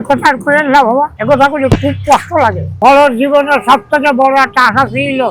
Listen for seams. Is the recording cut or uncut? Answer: cut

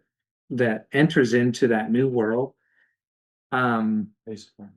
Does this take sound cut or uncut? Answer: uncut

